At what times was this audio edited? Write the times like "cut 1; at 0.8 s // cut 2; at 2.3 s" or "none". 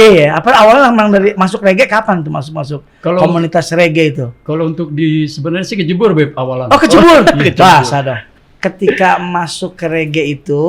cut 1; at 8.2 s